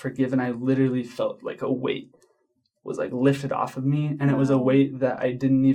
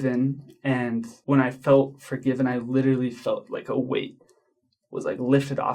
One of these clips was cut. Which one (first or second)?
second